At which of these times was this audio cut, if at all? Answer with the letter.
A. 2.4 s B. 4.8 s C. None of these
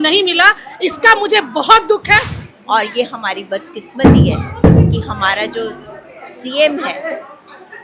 A